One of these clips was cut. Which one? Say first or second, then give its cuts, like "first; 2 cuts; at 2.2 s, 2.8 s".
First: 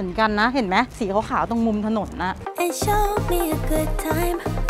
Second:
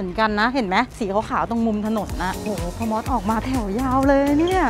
second; 1 cut; at 2.4 s